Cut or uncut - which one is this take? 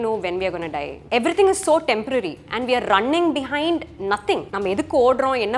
cut